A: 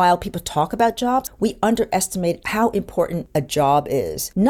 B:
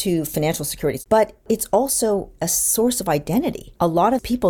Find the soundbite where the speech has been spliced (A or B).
B